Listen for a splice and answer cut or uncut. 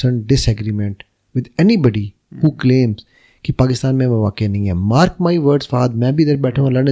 uncut